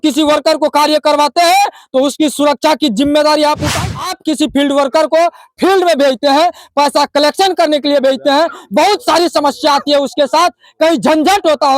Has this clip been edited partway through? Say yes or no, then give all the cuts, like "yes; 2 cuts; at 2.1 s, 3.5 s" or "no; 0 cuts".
yes; 1 cut; at 3.7 s